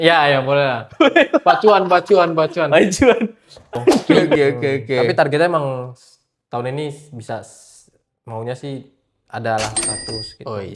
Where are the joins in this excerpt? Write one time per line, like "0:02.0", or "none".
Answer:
0:04.3